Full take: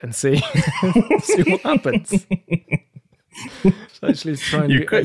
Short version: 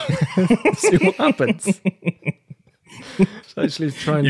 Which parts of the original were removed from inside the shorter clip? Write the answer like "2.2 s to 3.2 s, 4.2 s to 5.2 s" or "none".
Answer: none